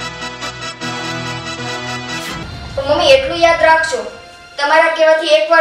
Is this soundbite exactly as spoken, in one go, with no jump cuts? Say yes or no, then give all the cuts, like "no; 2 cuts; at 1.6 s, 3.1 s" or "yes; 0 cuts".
no; 1 cut; at 2.4 s